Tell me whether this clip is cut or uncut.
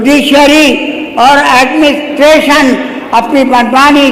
uncut